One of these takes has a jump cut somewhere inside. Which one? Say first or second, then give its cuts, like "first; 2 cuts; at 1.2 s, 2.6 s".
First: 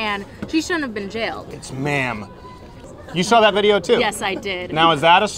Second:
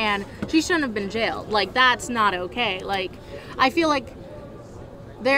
first; 2 cuts; at 1.4 s, 2.8 s